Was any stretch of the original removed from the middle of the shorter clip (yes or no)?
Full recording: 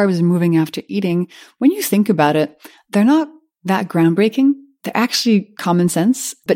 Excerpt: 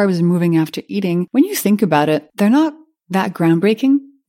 yes